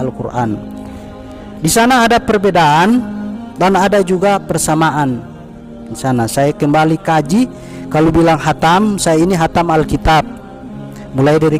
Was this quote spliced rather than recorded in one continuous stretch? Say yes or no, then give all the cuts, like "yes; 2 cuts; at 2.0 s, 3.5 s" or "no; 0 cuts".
no; 0 cuts